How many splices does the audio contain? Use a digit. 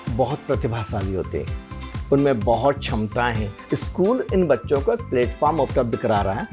1